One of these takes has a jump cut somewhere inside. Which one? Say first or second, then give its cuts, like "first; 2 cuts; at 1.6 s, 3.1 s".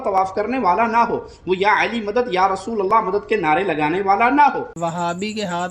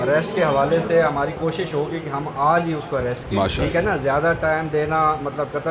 first; 1 cut; at 4.7 s